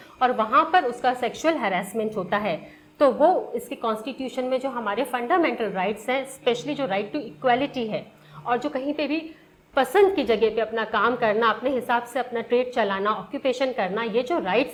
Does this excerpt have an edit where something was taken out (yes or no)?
no